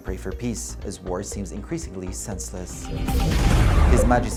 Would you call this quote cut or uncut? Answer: uncut